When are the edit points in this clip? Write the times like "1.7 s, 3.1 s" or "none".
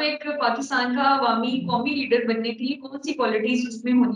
none